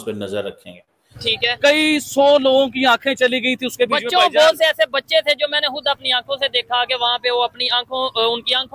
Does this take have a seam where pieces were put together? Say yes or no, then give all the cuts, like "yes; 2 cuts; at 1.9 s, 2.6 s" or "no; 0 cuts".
yes; 1 cut; at 1.2 s